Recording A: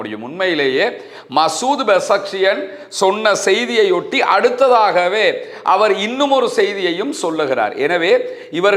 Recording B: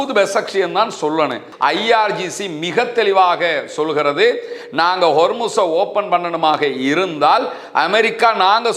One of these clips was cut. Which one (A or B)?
B